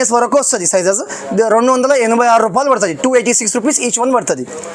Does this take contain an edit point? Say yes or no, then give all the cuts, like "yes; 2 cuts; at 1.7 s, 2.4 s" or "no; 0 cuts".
no; 0 cuts